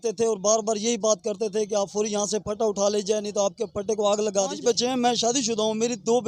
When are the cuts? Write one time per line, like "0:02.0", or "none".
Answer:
0:04.6

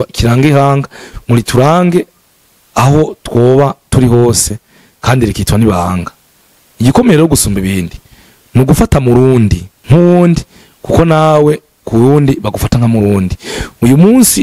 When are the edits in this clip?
0:09.7

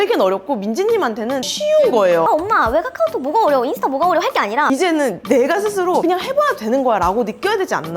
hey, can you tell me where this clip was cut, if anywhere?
0:06.0

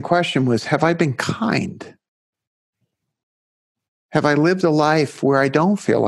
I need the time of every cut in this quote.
none

